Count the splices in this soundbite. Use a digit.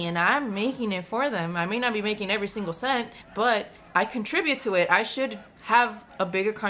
3